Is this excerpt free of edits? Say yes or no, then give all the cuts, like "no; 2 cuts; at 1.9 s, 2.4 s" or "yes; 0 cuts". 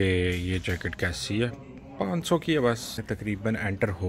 no; 1 cut; at 3.0 s